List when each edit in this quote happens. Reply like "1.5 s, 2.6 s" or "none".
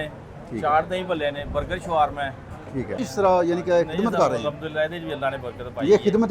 3.0 s